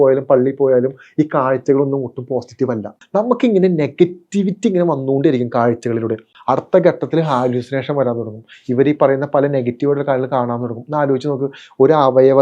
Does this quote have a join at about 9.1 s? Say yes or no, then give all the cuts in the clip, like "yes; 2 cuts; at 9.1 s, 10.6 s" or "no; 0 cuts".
no; 2 cuts; at 3.0 s, 6.3 s